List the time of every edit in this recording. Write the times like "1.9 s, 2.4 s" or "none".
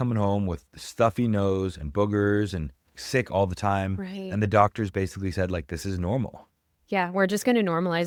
none